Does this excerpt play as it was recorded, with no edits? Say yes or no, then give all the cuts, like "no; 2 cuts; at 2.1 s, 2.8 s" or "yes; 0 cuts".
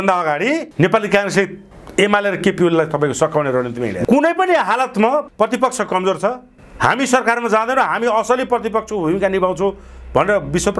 no; 1 cut; at 4.0 s